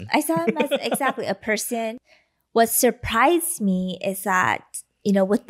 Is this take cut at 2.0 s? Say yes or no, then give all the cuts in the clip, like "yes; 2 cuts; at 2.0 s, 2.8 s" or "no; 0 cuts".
yes; 1 cut; at 2.0 s